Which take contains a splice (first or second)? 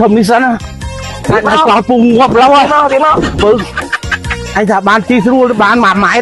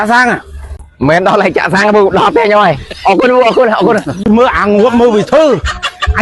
second